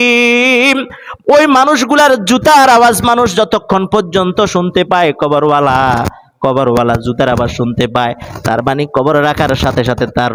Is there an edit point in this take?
no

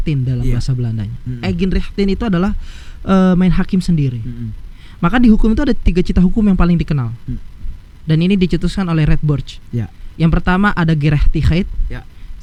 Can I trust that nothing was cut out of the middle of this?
yes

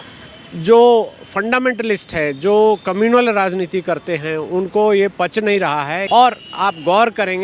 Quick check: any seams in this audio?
yes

